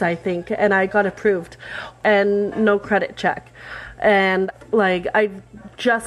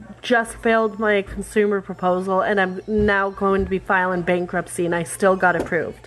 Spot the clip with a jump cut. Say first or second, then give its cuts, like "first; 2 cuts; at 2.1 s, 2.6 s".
first; 2 cuts; at 2.0 s, 4.5 s